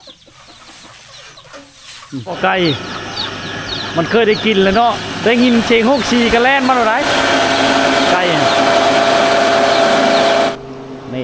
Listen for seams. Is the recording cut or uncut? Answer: cut